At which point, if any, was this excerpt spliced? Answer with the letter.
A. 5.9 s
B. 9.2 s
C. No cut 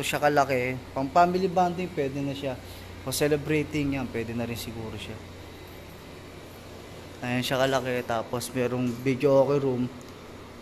C